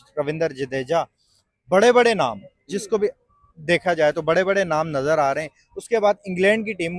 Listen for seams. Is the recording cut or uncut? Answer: uncut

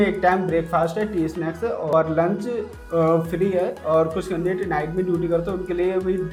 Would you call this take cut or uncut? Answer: uncut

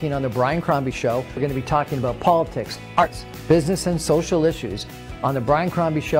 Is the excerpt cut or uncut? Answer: cut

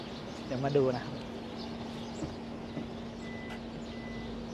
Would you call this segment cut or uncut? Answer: uncut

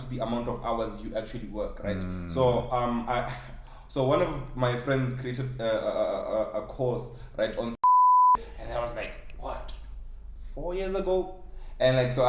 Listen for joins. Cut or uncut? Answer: uncut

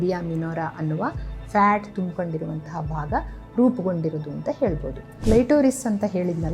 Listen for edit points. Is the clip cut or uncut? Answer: cut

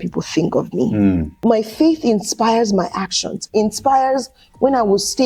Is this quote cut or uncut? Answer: cut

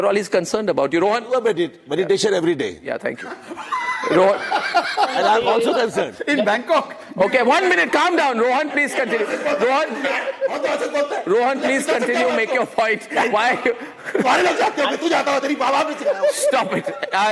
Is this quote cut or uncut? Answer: uncut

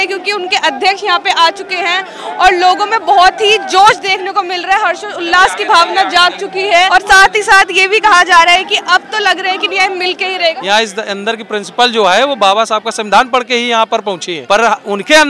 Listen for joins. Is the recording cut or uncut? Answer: cut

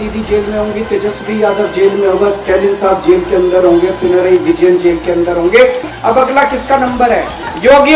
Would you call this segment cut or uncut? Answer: cut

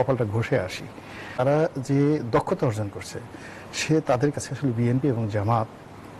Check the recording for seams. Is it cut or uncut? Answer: cut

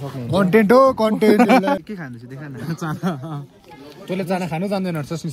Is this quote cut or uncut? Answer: cut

